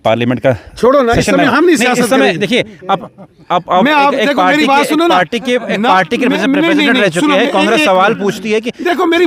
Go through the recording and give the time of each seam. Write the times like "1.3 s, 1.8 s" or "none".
none